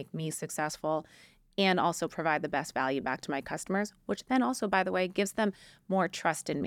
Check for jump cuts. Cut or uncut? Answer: uncut